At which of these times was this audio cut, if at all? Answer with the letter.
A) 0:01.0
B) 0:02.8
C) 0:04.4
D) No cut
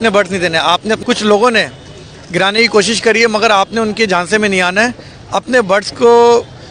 A